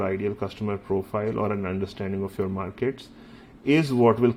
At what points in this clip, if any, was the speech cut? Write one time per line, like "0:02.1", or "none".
none